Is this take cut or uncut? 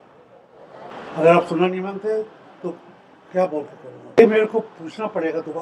cut